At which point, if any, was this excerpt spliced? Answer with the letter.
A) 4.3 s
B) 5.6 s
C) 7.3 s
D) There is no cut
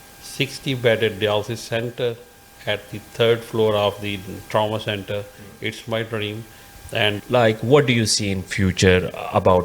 C